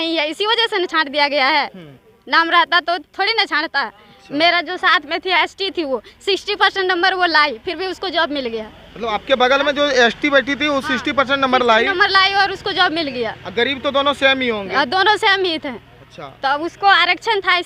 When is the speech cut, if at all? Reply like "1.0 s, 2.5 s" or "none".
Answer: none